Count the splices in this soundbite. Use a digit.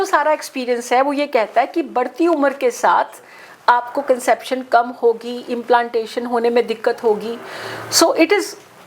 0